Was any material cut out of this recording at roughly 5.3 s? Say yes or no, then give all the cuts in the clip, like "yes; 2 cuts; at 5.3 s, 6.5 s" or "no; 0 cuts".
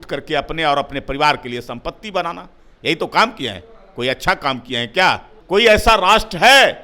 yes; 1 cut; at 5.3 s